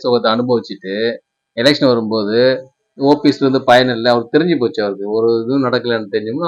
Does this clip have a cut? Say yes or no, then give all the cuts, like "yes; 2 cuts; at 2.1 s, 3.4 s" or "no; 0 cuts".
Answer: no; 0 cuts